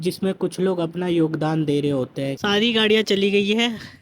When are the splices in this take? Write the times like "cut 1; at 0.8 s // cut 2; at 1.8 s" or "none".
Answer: cut 1; at 2.3 s

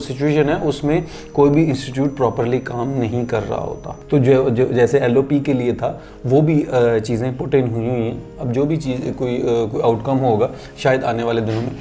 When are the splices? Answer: cut 1; at 3.8 s

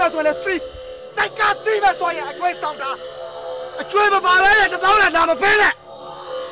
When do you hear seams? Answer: none

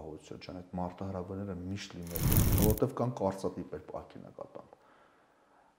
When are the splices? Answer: cut 1; at 2.4 s

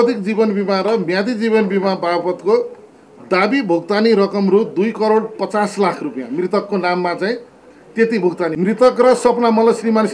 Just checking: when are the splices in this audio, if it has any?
cut 1; at 8.5 s

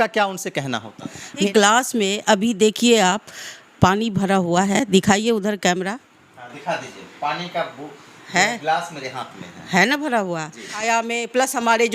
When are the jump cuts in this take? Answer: cut 1; at 1.4 s // cut 2; at 10.7 s

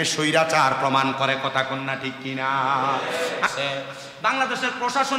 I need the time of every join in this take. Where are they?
cut 1; at 3.5 s

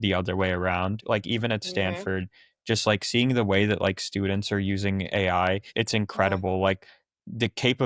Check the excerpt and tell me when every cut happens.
cut 1; at 1.0 s // cut 2; at 5.7 s

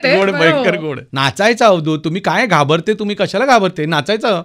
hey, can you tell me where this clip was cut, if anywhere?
cut 1; at 1.0 s

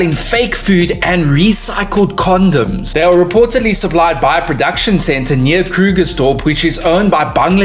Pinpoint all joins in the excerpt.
none

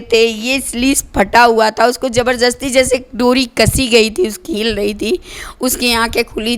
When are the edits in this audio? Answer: cut 1; at 4.5 s

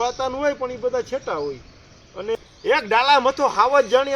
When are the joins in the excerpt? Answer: cut 1; at 2.3 s

